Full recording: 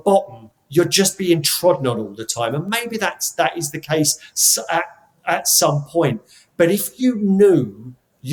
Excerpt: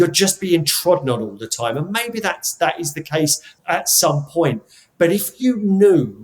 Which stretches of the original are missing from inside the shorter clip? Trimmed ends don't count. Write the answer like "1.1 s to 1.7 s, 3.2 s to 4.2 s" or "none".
4.3 s to 5.1 s

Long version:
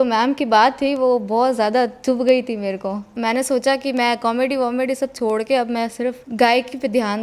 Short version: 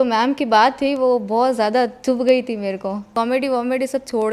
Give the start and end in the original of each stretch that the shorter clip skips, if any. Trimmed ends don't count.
3.1 s to 4.2 s

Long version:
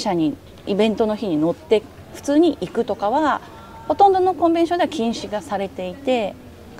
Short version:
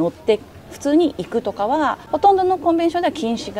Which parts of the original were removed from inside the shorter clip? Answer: 3.5 s to 3.8 s

